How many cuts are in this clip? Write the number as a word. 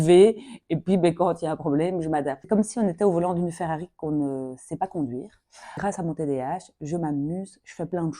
two